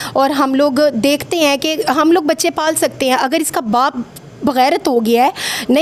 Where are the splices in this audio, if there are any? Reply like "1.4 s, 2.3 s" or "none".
none